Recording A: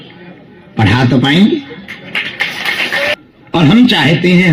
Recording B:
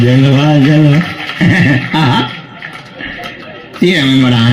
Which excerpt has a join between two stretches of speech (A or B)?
A